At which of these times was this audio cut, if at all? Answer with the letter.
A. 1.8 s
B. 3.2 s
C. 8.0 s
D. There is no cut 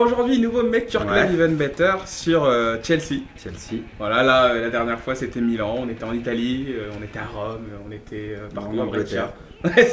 B